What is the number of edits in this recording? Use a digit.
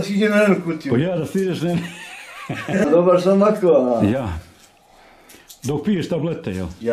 1